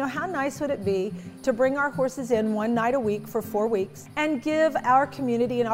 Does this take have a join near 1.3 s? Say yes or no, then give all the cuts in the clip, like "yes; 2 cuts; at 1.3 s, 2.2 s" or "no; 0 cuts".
yes; 2 cuts; at 1.3 s, 4.0 s